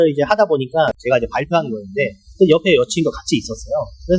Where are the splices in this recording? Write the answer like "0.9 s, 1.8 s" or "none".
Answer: 0.9 s